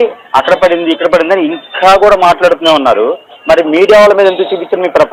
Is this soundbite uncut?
yes; 0 cuts

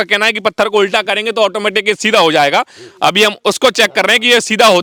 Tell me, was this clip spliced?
no; 0 cuts

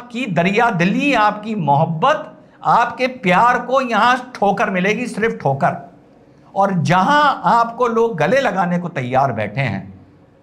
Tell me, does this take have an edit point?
no; 0 cuts

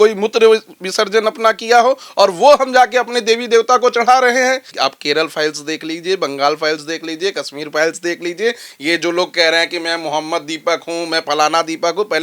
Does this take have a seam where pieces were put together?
yes; 1 cut; at 4.7 s

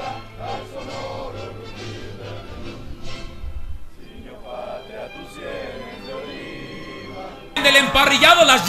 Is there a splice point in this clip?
no; 0 cuts

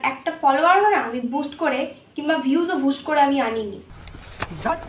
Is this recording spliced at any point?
yes; 1 cut; at 3.8 s

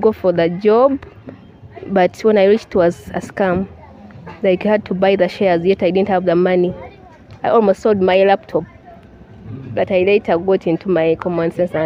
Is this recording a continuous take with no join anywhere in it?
yes; 0 cuts

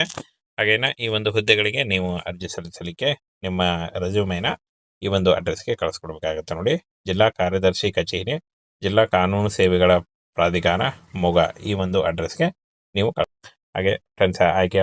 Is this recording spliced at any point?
yes; 1 cut; at 13.3 s

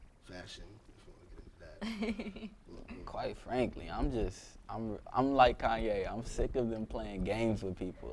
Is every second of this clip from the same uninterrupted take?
no; 1 cut; at 4.1 s

